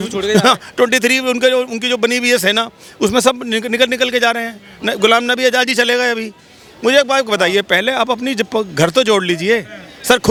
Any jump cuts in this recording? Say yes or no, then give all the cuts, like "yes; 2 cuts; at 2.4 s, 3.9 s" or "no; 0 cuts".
no; 0 cuts